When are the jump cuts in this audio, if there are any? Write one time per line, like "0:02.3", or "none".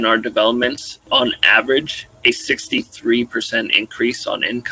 0:01.0